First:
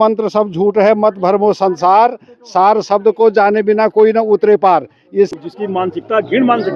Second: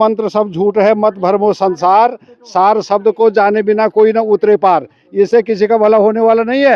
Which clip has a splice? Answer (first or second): first